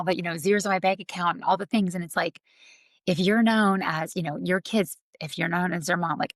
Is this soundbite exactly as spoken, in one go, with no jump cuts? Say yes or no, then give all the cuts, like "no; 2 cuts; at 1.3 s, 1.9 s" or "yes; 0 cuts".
yes; 0 cuts